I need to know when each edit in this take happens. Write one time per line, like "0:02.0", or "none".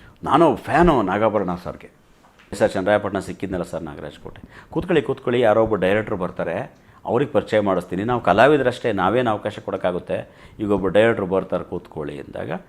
0:02.6